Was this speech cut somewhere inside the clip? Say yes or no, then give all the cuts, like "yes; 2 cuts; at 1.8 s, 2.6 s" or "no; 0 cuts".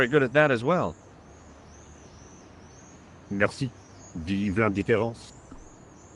yes; 3 cuts; at 1.0 s, 3.3 s, 5.2 s